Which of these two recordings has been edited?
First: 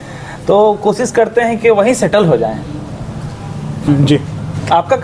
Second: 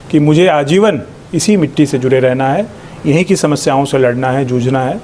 first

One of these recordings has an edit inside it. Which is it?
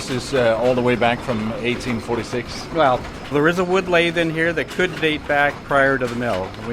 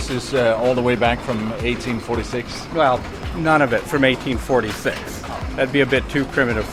first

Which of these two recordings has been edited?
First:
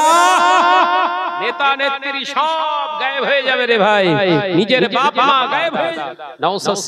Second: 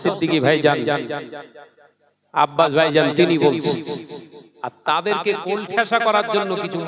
first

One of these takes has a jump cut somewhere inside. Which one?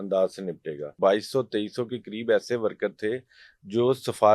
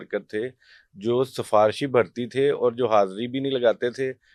first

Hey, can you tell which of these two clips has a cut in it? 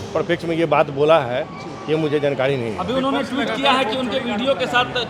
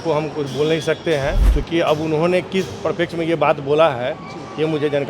second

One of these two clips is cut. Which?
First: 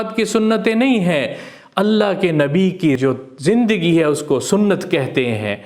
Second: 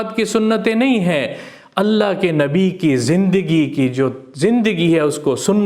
first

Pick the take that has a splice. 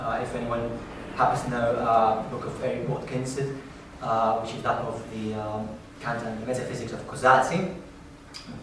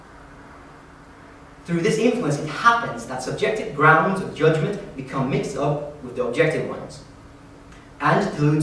first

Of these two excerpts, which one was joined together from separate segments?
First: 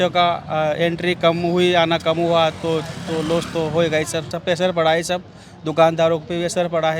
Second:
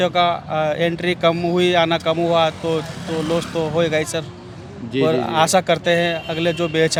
first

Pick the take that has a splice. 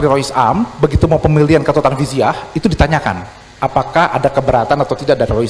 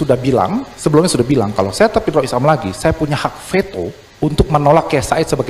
second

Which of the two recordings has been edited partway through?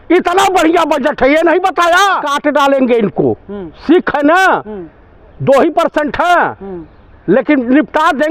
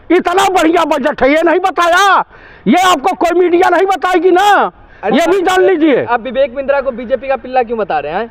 first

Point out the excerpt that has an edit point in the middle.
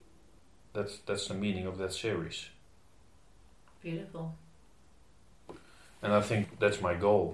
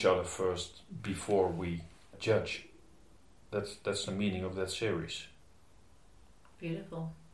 first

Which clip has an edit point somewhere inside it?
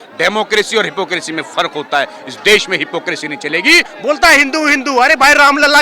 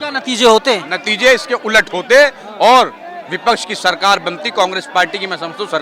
first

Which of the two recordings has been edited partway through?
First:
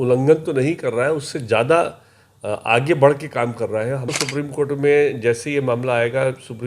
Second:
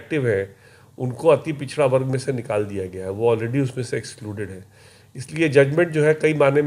first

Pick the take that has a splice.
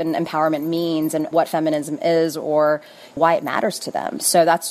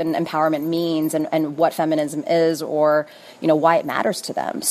first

